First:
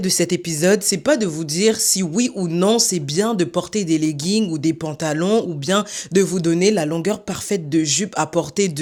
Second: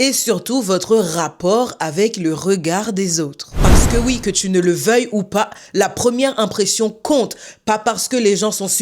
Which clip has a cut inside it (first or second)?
second